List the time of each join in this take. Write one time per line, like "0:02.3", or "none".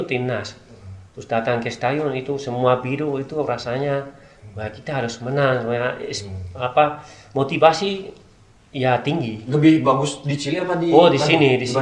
none